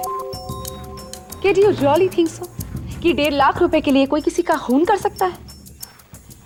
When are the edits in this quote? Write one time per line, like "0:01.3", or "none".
none